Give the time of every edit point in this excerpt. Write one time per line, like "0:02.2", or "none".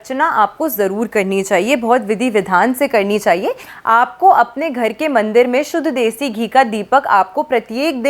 0:03.6